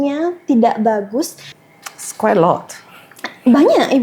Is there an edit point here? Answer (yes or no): yes